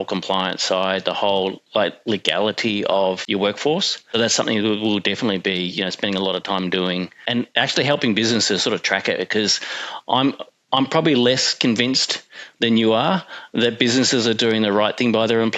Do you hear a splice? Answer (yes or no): yes